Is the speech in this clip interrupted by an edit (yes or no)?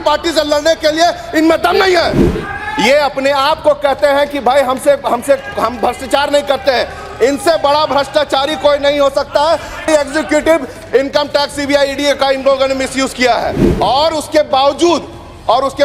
yes